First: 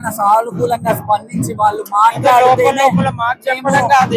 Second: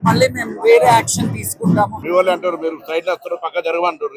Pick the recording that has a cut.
second; 1 cut; at 2.0 s

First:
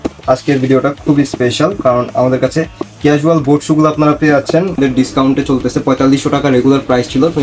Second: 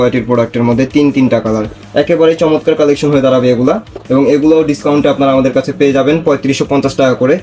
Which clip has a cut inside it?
first; 1 cut; at 4.8 s

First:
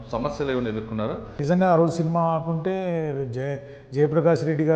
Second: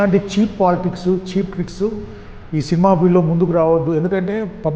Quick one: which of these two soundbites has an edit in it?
first; 1 cut; at 1.4 s

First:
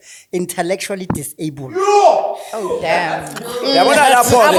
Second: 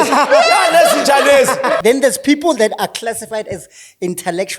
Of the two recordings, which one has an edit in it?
second; 1 cut; at 1.8 s

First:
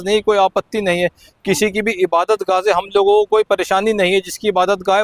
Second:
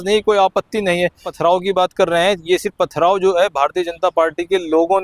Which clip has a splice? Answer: second; 1 cut; at 1.3 s

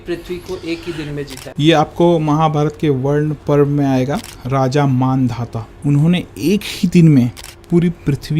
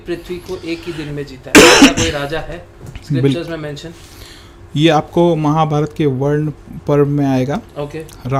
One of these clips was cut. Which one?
first; 5 cuts; at 1.4 s, 3.4 s, 4.3 s, 5.7 s, 7.5 s

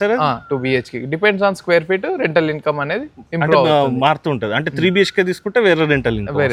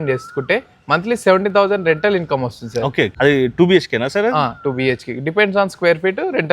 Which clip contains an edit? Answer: second; 1 cut; at 3.1 s

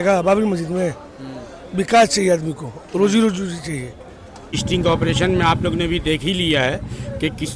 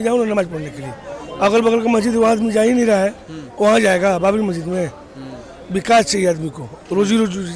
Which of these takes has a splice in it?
first; 1 cut; at 4.6 s

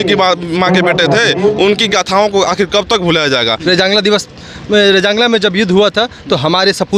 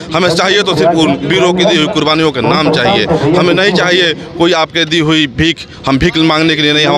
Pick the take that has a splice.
first; 1 cut; at 3.6 s

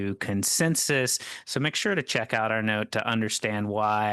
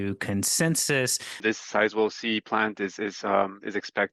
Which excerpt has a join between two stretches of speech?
second; 1 cut; at 1.4 s

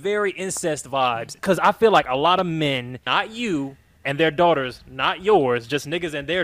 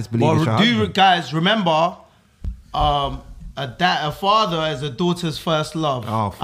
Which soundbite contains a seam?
first; 2 cuts; at 1.4 s, 2.9 s

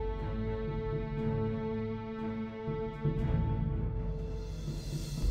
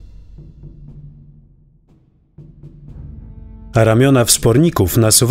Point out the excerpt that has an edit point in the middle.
second; 1 cut; at 2.0 s

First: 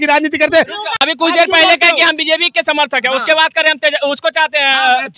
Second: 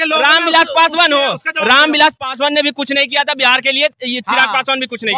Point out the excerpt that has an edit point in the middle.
first; 1 cut; at 0.9 s

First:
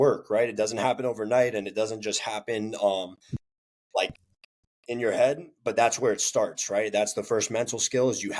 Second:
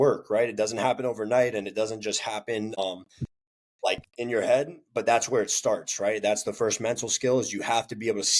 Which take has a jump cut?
second; 2 cuts; at 2.8 s, 4.1 s

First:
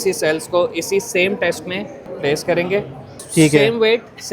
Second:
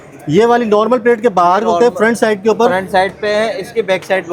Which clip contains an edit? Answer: first; 2 cuts; at 2.1 s, 3.2 s

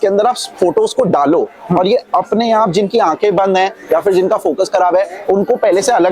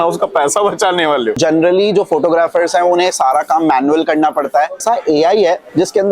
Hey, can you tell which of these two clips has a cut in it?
second; 2 cuts; at 1.4 s, 4.8 s

